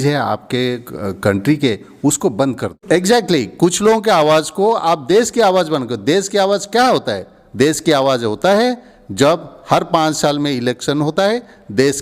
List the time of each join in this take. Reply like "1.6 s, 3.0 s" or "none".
2.8 s